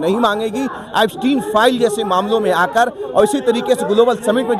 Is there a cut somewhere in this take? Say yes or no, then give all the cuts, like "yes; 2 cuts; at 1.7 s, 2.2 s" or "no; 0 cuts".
no; 0 cuts